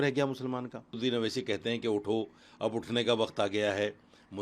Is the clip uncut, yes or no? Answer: no